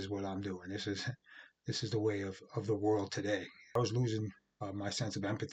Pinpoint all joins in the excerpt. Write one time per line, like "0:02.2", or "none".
0:03.8